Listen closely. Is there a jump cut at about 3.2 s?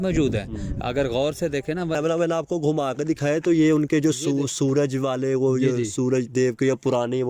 no; 1 cut; at 2.0 s

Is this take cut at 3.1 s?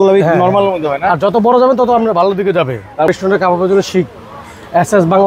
yes; 1 cut; at 3.1 s

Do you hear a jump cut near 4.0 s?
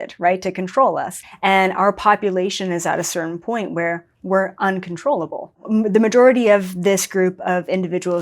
no; 2 cuts; at 1.2 s, 5.6 s

